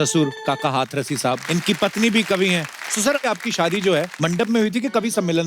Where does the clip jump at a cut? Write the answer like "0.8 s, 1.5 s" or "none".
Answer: 1.4 s, 3.2 s, 4.1 s